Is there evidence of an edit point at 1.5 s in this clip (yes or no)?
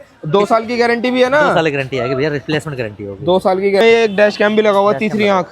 no